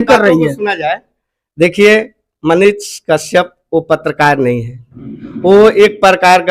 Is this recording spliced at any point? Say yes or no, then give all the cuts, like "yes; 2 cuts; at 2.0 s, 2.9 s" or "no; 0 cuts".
no; 0 cuts